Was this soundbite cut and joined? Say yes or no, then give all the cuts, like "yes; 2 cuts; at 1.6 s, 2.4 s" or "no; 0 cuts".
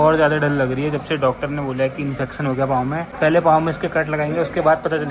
no; 0 cuts